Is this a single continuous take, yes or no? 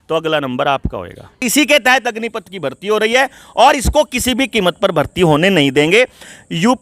no